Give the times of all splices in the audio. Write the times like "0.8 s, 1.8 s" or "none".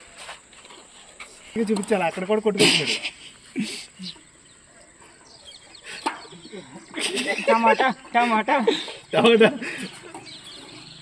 1.5 s